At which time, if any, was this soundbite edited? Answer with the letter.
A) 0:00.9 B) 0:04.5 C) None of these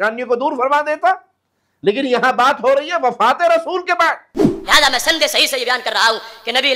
B